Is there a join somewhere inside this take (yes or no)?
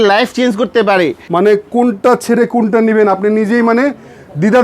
yes